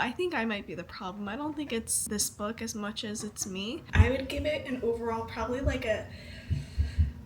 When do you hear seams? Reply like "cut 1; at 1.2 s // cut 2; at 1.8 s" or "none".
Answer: cut 1; at 2.0 s // cut 2; at 3.8 s